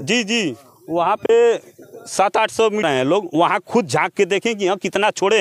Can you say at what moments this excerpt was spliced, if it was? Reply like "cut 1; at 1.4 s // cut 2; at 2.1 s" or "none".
cut 1; at 2.8 s